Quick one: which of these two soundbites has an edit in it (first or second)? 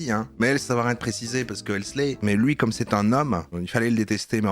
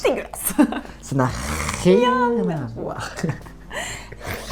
first